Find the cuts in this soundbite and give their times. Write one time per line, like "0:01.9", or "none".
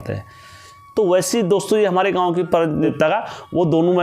0:02.9